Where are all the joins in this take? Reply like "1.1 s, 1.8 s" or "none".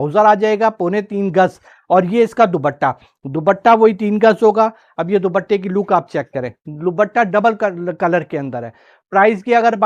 none